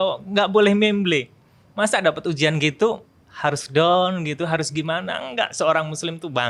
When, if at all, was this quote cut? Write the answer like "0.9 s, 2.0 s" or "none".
none